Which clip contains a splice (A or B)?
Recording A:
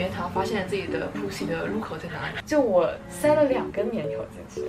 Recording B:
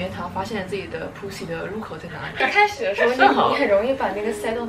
A